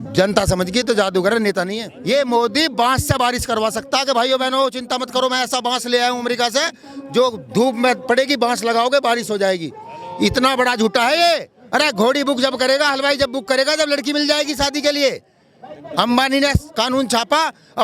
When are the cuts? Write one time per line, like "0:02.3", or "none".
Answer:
0:01.9
0:11.5